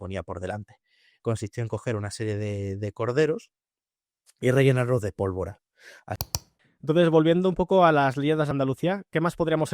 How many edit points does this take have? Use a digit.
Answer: 3